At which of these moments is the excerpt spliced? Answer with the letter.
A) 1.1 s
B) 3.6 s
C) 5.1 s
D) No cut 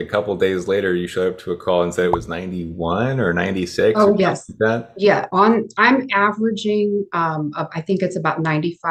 D